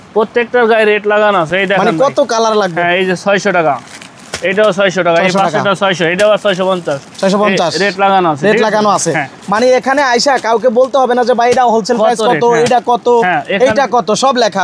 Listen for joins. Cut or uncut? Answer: uncut